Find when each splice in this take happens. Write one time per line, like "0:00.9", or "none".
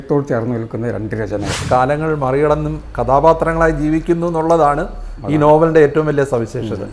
0:01.6